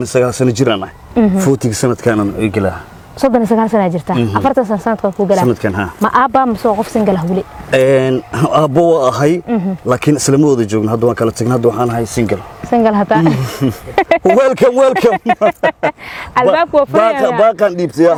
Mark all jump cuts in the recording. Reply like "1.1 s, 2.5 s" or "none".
none